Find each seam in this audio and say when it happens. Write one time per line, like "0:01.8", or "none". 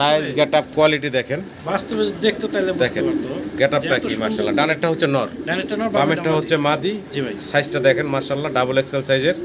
none

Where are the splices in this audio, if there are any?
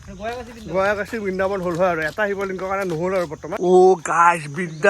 0:03.6

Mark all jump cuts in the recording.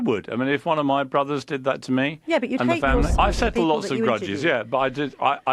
0:03.1

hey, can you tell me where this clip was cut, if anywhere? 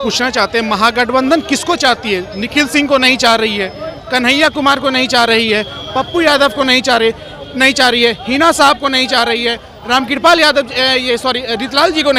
none

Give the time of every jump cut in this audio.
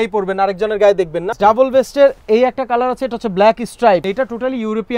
0:01.3
0:04.0

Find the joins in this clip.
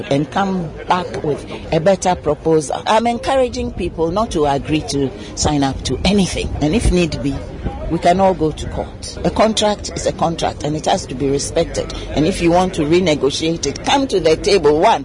0:02.9
0:06.5
0:09.0

